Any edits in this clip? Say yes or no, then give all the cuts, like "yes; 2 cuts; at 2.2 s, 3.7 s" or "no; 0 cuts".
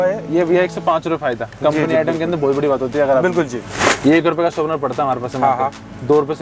yes; 1 cut; at 3.6 s